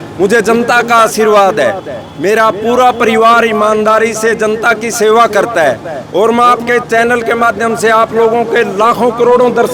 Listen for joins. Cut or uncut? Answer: uncut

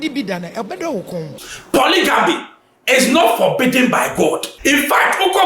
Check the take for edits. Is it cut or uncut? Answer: cut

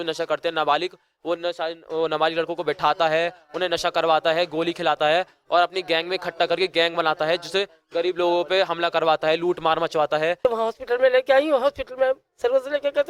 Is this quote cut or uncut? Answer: cut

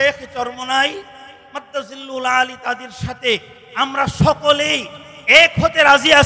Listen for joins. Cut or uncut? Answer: uncut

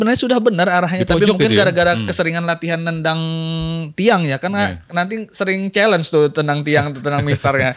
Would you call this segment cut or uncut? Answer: uncut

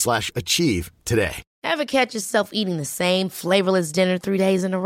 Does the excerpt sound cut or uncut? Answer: cut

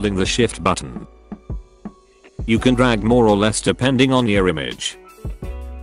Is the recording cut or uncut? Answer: cut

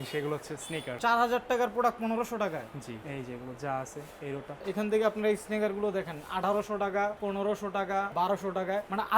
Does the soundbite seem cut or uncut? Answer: cut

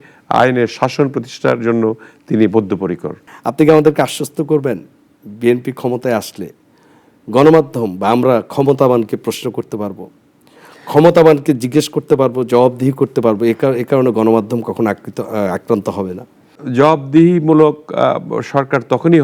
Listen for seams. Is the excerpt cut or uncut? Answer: uncut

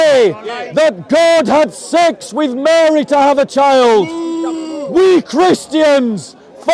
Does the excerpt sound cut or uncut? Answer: uncut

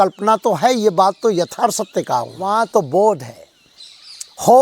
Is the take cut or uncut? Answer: cut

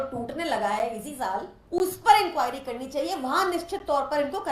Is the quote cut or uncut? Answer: cut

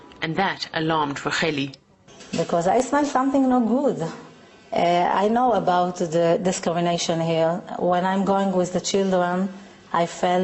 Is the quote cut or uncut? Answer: uncut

